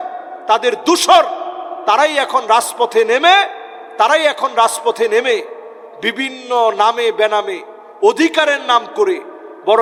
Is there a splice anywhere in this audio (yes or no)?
no